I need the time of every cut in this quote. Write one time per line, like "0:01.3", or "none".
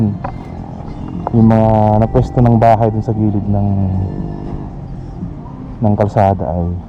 none

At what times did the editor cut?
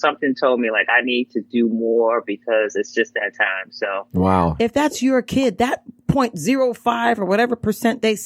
0:04.5

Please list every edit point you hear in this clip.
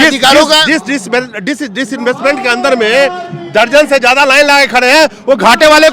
none

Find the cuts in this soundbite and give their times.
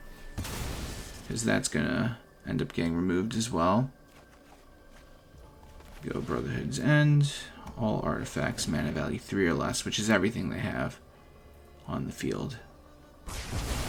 none

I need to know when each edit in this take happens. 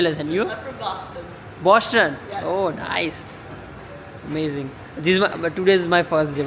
none

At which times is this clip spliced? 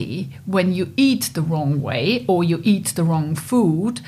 none

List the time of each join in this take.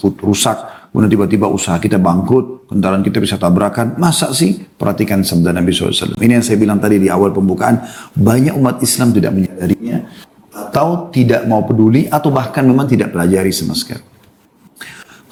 none

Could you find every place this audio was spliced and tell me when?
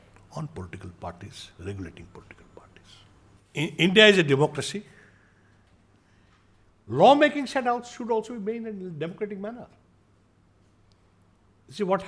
0:03.4

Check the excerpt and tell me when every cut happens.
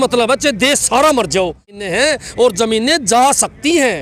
0:01.8

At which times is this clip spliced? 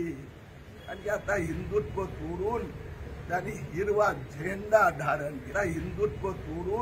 0:05.5

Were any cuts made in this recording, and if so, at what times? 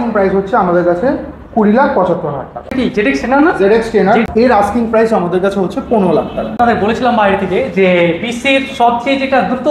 0:02.6
0:04.3
0:06.5

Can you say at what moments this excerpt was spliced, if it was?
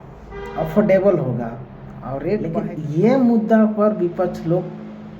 0:02.5

